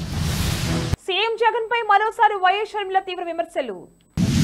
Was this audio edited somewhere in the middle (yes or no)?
no